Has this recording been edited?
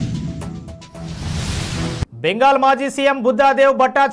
yes; 1 cut; at 2.0 s

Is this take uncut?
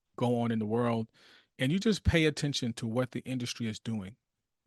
yes; 0 cuts

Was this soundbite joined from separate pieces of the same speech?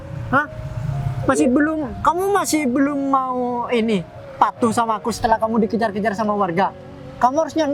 no; 0 cuts

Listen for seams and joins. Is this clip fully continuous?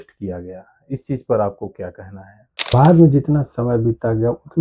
no; 1 cut; at 2.7 s

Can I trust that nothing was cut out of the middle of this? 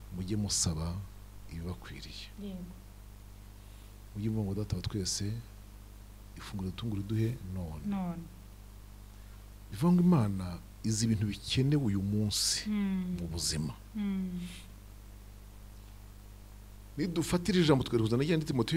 yes; 0 cuts

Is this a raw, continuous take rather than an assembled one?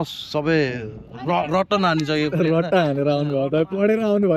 yes; 0 cuts

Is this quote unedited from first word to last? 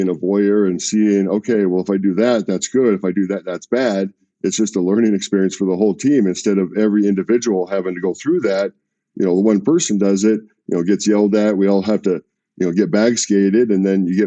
no; 1 cut; at 4.3 s

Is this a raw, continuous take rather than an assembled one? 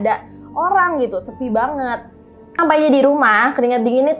no; 1 cut; at 2.6 s

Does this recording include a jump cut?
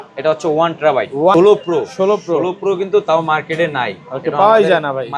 yes; 1 cut; at 1.3 s

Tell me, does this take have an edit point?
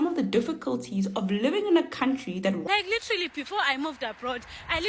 yes; 1 cut; at 2.6 s

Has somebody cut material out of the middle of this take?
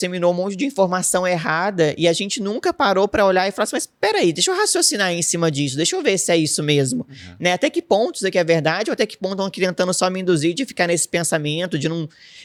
no; 0 cuts

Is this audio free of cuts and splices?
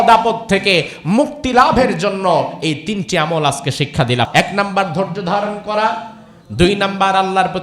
no; 1 cut; at 4.3 s

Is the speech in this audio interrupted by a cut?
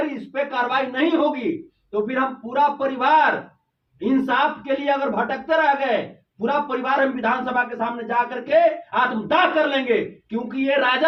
no; 0 cuts

